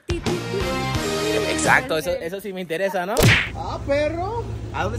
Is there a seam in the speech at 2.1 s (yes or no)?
no